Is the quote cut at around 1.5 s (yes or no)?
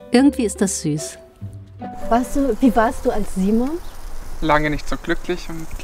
yes